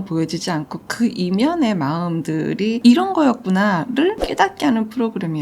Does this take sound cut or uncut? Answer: cut